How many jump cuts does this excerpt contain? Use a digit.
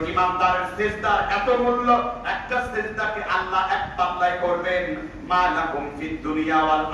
0